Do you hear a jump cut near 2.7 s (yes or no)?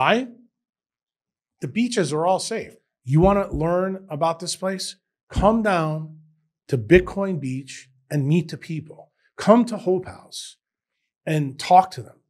yes